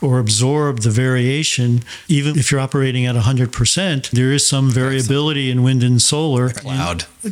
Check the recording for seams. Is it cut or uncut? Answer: cut